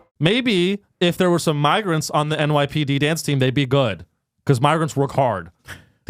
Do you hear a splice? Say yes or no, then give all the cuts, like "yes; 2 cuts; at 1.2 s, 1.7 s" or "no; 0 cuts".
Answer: no; 0 cuts